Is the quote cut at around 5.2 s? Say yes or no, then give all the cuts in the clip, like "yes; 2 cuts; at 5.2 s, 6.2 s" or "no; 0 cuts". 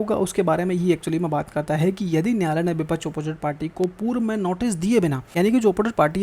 yes; 1 cut; at 5.2 s